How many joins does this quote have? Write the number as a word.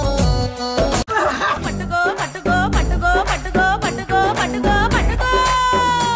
one